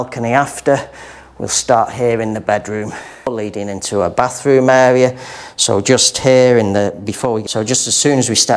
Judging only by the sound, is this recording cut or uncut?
cut